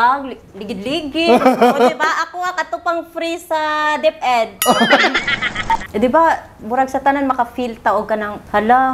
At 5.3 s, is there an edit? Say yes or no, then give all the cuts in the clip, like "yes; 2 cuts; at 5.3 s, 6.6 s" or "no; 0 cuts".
yes; 1 cut; at 5.3 s